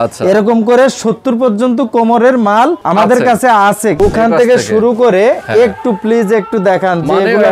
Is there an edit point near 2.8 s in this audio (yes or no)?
yes